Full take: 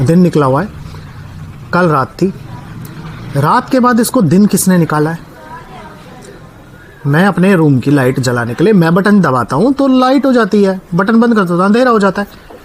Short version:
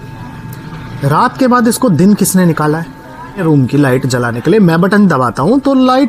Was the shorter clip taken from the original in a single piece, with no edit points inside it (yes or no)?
no